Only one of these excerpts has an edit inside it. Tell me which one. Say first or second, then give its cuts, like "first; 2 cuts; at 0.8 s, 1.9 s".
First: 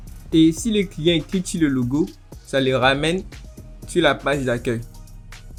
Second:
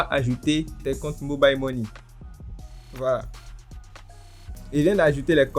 second; 1 cut; at 4.6 s